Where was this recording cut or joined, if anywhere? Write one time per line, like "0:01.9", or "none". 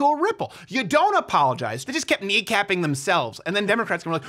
0:01.8